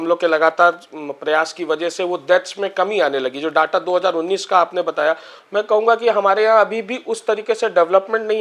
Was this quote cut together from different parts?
yes; 1 cut; at 5.3 s

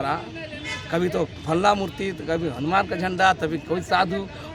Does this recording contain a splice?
no; 0 cuts

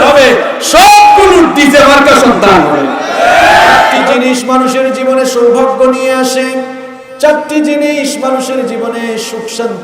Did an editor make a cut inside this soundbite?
yes; 1 cut; at 4.1 s

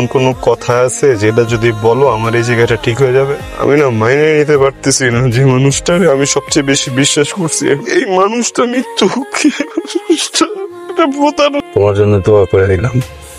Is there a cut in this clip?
yes; 2 cuts; at 3.4 s, 11.6 s

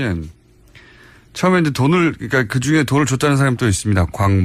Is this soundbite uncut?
yes; 0 cuts

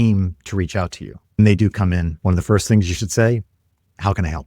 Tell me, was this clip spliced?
yes; 2 cuts; at 1.4 s, 2.1 s

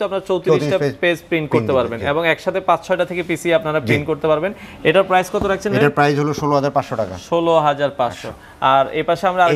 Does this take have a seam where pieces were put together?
no; 0 cuts

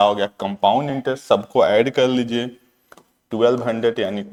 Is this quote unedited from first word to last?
yes; 0 cuts

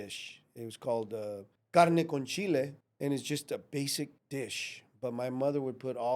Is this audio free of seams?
no; 3 cuts; at 1.5 s, 2.8 s, 4.2 s

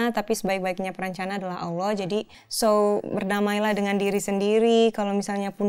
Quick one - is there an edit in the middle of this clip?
yes; 1 cut; at 2.4 s

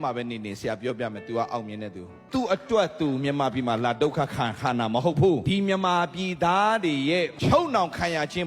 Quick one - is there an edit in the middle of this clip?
yes; 3 cuts; at 2.2 s, 5.4 s, 7.3 s

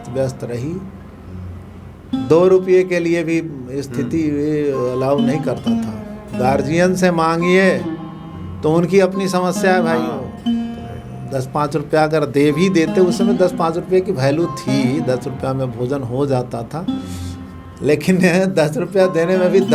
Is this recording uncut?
yes; 0 cuts

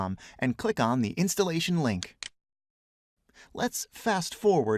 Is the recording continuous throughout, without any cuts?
no; 1 cut; at 2.6 s

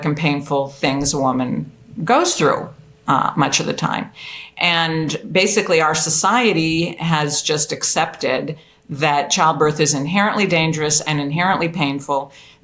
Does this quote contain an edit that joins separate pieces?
no; 0 cuts

